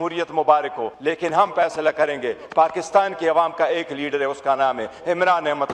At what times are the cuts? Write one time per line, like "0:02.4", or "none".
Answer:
0:00.9